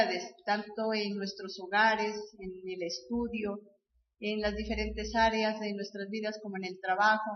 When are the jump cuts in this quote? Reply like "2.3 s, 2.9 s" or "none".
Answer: none